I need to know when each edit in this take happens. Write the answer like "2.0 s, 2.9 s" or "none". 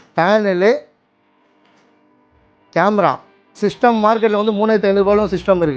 3.6 s